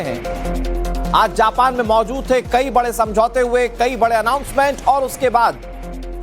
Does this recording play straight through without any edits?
no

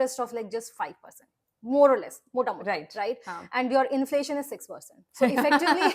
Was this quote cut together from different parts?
no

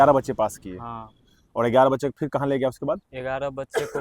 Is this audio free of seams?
yes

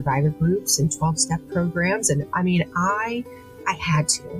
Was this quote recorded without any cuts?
no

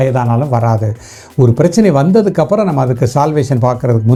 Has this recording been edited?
no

